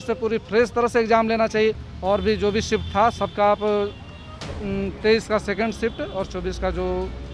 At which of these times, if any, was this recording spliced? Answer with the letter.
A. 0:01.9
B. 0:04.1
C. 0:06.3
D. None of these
A